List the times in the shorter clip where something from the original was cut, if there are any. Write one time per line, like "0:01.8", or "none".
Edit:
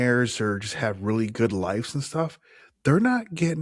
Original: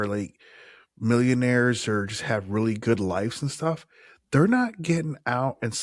none